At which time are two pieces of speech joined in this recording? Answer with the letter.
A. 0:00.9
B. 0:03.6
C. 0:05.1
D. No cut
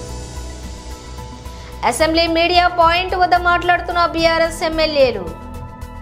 A